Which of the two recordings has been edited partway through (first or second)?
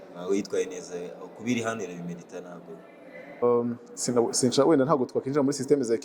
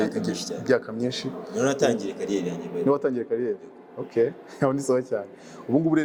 first